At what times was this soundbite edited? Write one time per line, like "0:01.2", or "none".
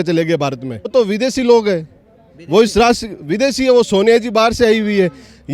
0:00.9